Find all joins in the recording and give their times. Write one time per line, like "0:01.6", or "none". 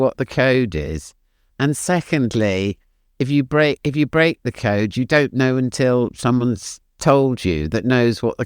none